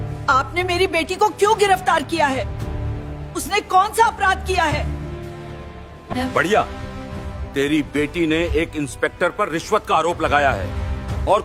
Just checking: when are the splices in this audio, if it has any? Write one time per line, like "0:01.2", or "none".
none